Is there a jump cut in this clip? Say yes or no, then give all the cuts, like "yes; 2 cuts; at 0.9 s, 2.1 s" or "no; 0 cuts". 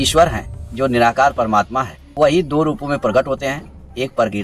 yes; 1 cut; at 2.0 s